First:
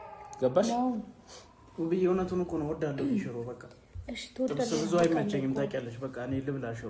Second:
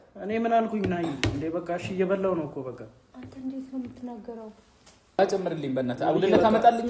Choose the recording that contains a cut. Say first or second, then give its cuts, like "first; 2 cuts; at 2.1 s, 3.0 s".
second; 1 cut; at 5.2 s